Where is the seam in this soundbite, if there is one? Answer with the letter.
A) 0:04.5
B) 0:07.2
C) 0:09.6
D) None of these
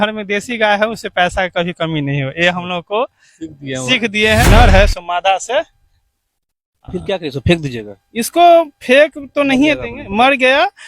A